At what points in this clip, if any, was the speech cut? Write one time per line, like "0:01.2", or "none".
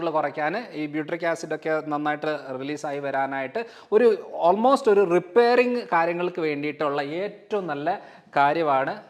none